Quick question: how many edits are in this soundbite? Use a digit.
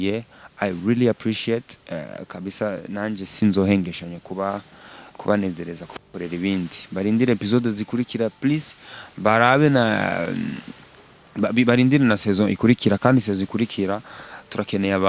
0